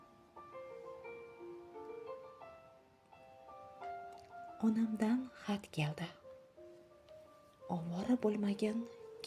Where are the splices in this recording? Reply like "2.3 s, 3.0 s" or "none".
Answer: 2.5 s